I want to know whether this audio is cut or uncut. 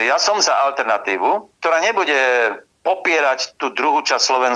uncut